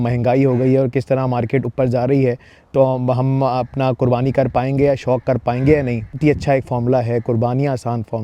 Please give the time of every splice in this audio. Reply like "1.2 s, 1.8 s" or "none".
6.2 s